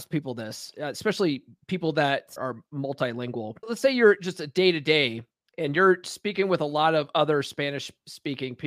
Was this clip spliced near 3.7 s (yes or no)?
yes